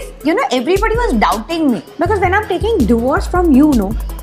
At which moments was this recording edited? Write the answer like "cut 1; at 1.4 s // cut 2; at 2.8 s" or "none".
cut 1; at 1.9 s

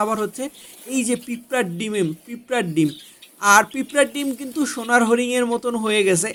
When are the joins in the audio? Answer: none

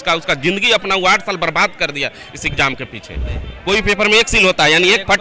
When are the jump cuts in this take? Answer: cut 1; at 3.5 s

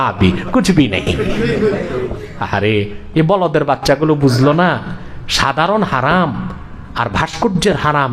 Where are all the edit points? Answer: cut 1; at 2.3 s

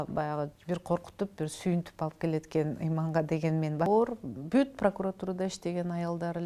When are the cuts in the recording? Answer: cut 1; at 3.9 s

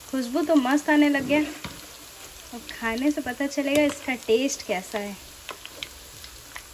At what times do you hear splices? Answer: none

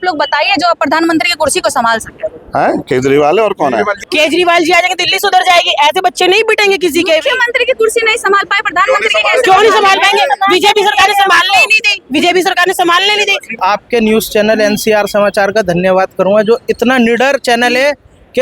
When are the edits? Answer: cut 1; at 4.0 s // cut 2; at 13.6 s

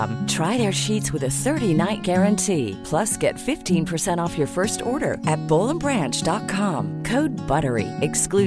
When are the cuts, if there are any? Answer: none

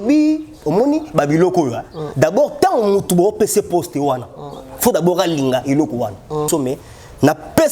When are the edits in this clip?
cut 1; at 6.5 s

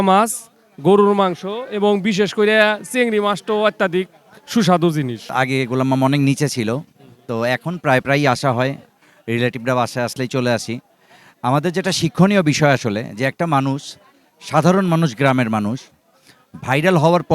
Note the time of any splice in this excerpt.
cut 1; at 5.3 s

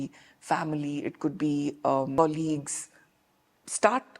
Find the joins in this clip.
cut 1; at 2.1 s

